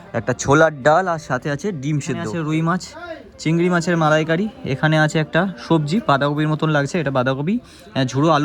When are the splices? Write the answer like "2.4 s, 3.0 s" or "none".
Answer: 2.3 s